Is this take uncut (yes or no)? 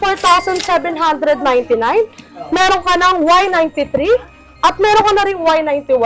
yes